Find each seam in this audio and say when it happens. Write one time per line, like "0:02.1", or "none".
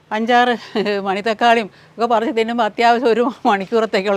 none